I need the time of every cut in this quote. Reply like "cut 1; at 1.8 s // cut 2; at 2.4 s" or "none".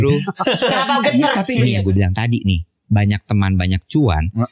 cut 1; at 1.5 s